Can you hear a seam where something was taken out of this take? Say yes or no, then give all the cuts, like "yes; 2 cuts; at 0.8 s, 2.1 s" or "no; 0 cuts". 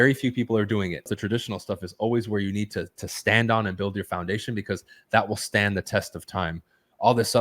yes; 1 cut; at 1.1 s